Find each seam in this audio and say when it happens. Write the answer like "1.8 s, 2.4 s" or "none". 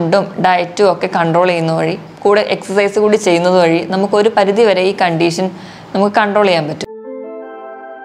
6.9 s